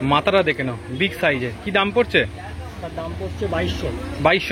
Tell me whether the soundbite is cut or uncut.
uncut